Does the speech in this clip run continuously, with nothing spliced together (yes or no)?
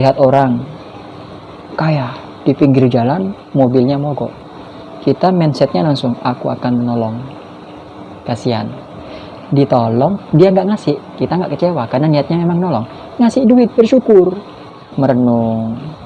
no